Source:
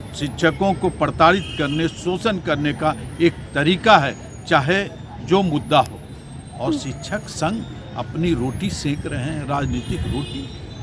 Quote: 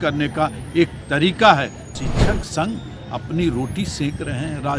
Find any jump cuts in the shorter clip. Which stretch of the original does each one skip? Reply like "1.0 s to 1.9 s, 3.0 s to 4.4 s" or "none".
4.4 s to 6.8 s